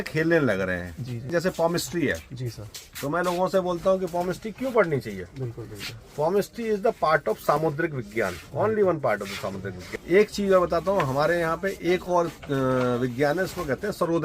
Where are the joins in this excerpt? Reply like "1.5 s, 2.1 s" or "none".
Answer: 1.3 s, 9.7 s